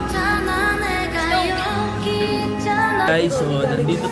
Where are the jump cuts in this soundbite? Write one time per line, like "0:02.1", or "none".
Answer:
0:03.1